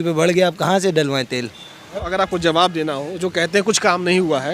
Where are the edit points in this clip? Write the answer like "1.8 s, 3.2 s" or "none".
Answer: 1.8 s